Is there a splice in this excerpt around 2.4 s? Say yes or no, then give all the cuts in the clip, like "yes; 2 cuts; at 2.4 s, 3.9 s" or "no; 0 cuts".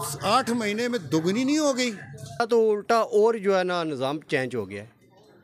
yes; 1 cut; at 2.4 s